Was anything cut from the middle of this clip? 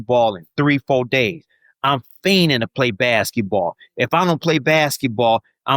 no; 0 cuts

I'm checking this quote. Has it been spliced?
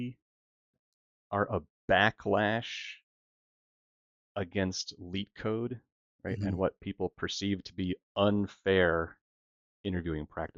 no; 0 cuts

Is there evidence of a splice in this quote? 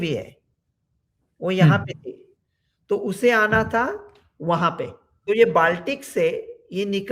yes; 1 cut; at 5.1 s

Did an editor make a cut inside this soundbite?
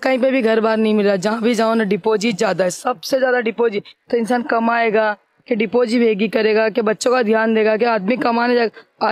no; 0 cuts

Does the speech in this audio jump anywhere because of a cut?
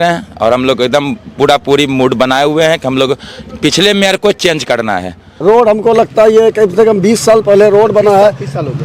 yes; 1 cut; at 5.3 s

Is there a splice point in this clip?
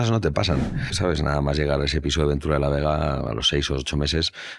yes; 1 cut; at 0.9 s

